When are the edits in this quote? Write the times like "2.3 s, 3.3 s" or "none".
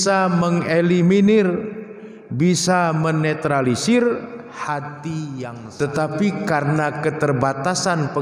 5.6 s